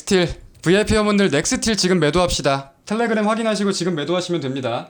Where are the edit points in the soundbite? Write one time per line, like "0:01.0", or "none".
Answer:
none